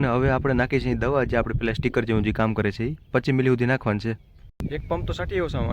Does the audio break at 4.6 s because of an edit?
yes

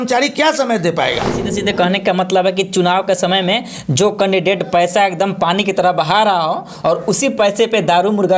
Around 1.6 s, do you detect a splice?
yes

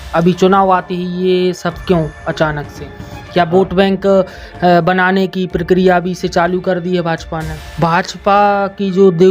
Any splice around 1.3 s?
no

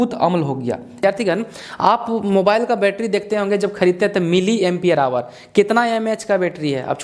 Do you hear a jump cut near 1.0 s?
yes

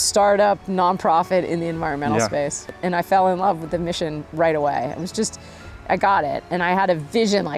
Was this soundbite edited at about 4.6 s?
no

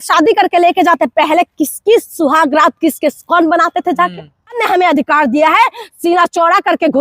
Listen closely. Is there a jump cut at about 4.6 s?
yes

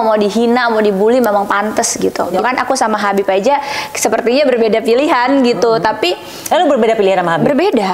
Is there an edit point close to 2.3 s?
yes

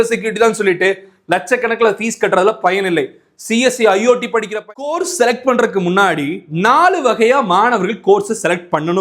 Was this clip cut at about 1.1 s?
no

